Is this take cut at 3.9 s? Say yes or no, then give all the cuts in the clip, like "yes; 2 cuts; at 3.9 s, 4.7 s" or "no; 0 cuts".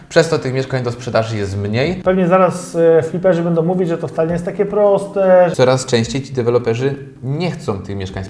no; 2 cuts; at 2.0 s, 5.5 s